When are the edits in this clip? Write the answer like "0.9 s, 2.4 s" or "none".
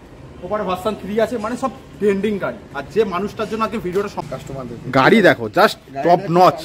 4.2 s